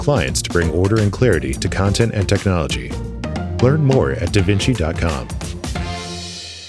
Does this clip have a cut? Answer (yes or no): yes